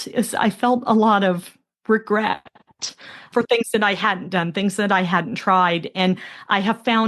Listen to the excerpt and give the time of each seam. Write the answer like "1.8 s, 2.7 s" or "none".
3.2 s